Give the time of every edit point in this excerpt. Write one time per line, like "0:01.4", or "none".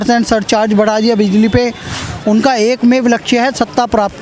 0:01.9